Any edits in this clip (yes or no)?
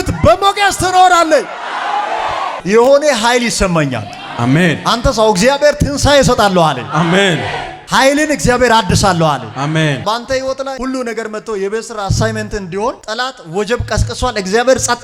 yes